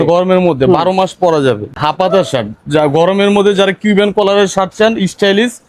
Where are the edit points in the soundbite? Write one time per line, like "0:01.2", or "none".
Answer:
0:01.7